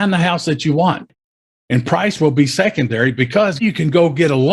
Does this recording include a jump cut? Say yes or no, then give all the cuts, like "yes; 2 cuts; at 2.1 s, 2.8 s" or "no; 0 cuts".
yes; 1 cut; at 3.6 s